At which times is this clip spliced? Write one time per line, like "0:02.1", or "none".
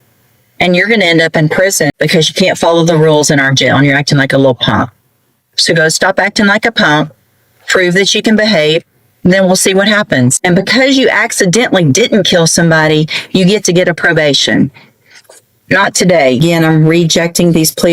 0:01.9
0:10.4
0:16.6